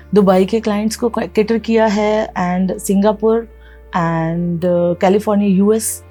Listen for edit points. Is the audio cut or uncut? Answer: uncut